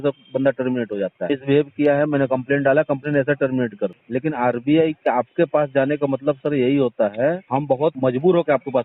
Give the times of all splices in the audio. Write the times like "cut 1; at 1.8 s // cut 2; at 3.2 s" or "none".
cut 1; at 1.2 s // cut 2; at 4.0 s // cut 3; at 7.8 s